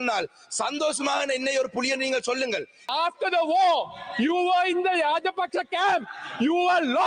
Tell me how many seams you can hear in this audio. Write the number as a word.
one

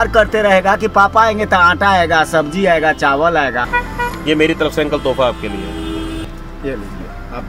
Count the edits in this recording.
two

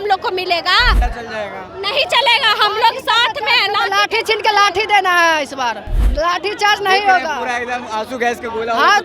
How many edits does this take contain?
two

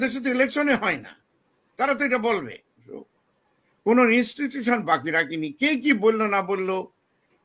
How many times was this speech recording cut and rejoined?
one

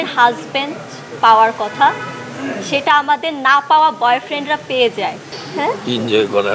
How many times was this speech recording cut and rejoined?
one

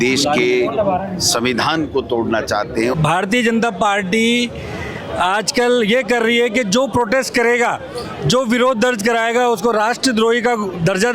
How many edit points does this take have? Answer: one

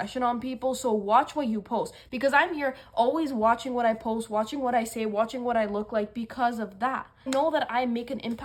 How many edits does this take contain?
zero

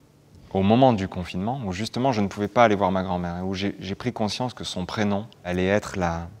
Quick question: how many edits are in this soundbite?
one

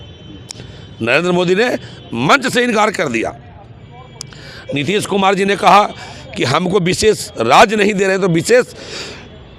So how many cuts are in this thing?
zero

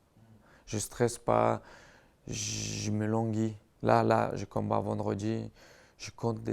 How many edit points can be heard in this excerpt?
zero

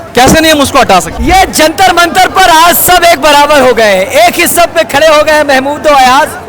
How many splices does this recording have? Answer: one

